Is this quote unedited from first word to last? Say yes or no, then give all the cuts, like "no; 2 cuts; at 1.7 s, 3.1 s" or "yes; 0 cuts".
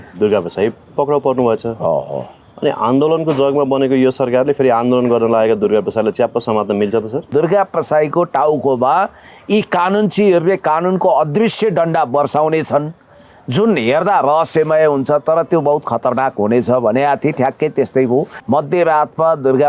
no; 2 cuts; at 7.3 s, 18.4 s